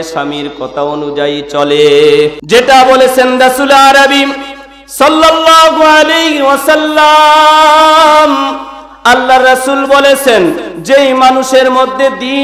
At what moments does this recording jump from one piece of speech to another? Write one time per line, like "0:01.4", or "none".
0:02.4